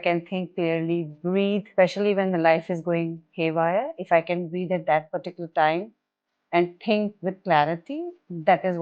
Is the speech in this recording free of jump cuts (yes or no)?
no